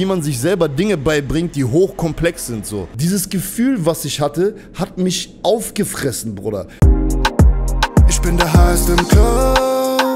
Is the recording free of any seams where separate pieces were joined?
no; 2 cuts; at 2.8 s, 6.7 s

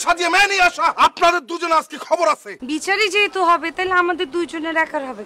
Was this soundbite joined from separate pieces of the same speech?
yes; 2 cuts; at 0.9 s, 2.5 s

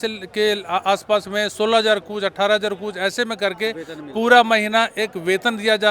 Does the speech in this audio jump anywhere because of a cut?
no; 0 cuts

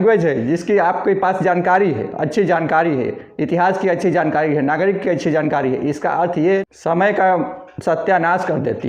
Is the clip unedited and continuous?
no; 1 cut; at 6.6 s

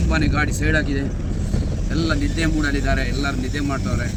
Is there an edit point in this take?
no; 0 cuts

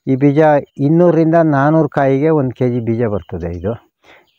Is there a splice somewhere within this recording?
no; 0 cuts

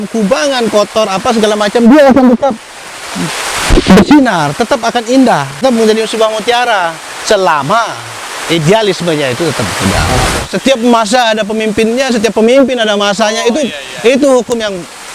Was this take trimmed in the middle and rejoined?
yes; 2 cuts; at 5.6 s, 10.5 s

